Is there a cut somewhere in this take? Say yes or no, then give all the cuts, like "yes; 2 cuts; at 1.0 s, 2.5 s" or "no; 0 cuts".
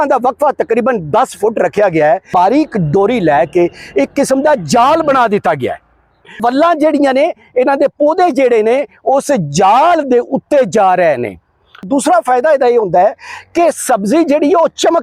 yes; 3 cuts; at 2.3 s, 6.4 s, 11.8 s